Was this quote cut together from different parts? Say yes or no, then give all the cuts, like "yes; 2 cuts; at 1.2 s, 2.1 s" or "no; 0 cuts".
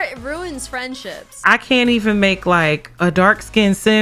yes; 1 cut; at 1.4 s